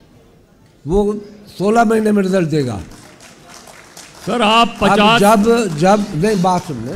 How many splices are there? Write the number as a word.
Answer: zero